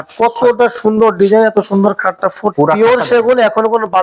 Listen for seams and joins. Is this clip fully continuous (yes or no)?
no